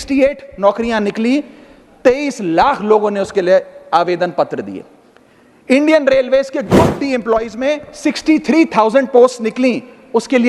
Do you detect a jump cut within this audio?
no; 0 cuts

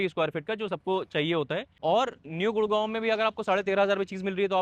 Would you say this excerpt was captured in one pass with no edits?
no; 1 cut; at 1.7 s

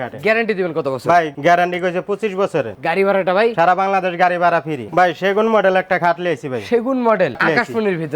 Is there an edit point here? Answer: yes; 3 cuts; at 2.7 s, 4.8 s, 7.4 s

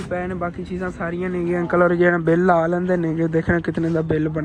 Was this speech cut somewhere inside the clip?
no; 0 cuts

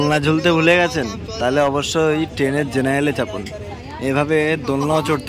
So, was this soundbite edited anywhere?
no; 0 cuts

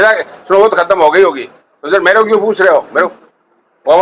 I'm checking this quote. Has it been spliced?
yes; 1 cut; at 3.1 s

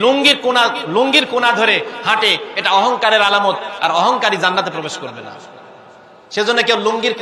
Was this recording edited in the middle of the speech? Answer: no; 0 cuts

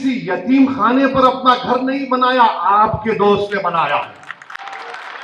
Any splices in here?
no; 0 cuts

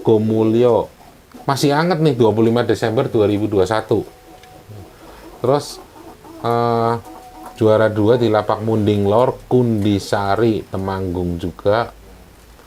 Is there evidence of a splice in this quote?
no; 0 cuts

